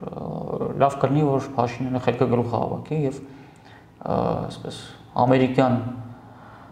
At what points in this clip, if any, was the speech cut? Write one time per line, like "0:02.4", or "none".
none